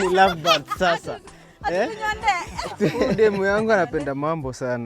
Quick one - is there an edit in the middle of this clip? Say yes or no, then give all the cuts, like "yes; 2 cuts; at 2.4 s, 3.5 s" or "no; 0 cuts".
yes; 1 cut; at 3.1 s